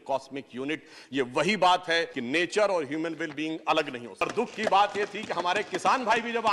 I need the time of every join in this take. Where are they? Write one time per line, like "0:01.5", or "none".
0:02.1
0:04.2